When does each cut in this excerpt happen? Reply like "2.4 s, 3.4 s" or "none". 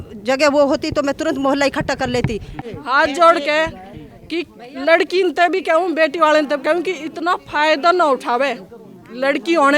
2.5 s